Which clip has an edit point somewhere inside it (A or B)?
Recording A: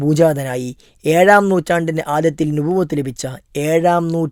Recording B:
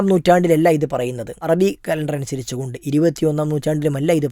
B